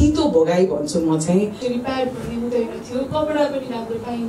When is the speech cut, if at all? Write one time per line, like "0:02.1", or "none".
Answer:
0:01.6